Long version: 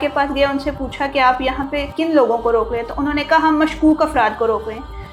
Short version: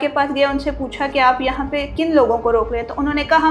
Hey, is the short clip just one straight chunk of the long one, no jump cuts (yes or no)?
yes